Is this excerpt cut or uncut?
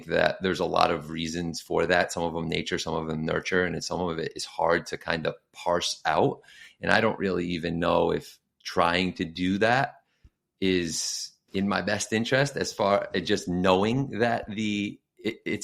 uncut